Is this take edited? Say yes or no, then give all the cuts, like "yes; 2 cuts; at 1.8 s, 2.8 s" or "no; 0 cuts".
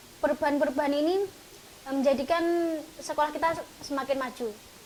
no; 0 cuts